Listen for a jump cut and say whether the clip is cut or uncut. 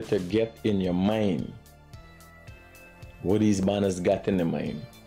cut